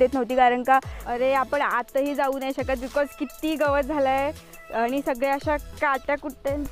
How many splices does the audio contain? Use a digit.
1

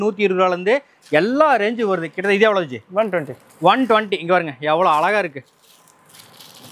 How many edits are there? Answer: 0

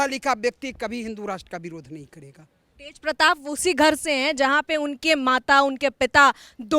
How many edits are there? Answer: 1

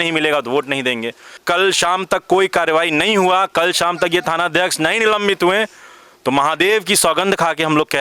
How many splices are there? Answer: 1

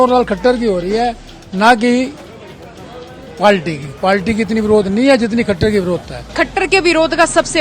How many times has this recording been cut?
1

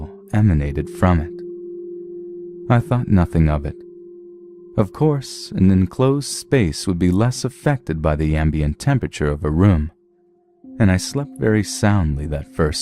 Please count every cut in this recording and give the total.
1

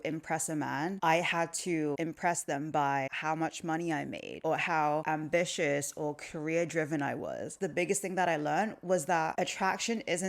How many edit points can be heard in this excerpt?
7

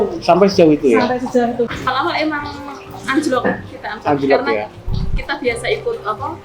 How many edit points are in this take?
1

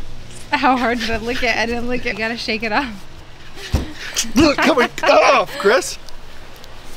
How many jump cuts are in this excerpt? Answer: 2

